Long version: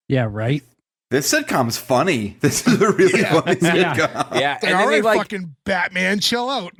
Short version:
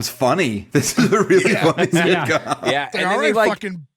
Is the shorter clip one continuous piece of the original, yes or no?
yes